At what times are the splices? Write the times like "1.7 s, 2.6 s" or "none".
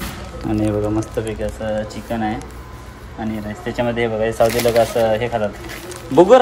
none